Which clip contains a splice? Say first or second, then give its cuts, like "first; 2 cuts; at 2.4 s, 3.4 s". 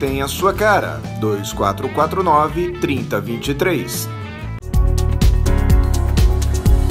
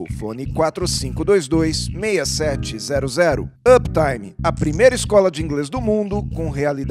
first; 1 cut; at 4.6 s